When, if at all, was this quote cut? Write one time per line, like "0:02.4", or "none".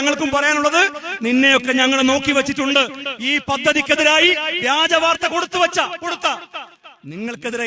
none